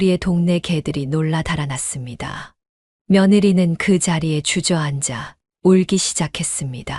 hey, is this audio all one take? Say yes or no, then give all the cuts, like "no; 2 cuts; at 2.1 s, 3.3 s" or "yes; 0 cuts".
yes; 0 cuts